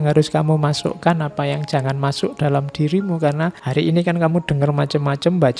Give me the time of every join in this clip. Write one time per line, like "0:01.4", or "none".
0:03.6